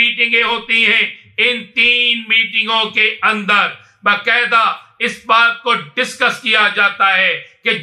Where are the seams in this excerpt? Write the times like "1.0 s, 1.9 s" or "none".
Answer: none